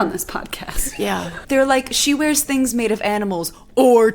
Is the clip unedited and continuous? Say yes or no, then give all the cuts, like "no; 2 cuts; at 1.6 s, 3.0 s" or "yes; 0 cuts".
no; 1 cut; at 1.3 s